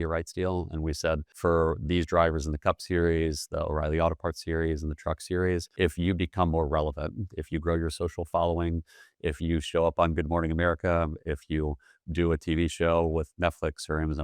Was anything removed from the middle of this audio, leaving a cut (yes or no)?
yes